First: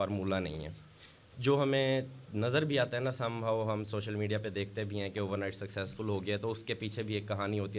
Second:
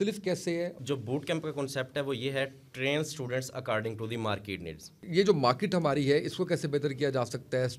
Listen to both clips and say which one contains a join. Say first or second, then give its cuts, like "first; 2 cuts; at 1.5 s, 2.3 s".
second; 2 cuts; at 0.8 s, 5.0 s